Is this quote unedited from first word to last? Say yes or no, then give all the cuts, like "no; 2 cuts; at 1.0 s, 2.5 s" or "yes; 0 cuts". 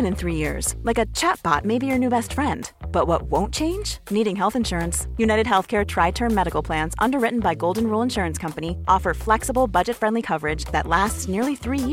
yes; 0 cuts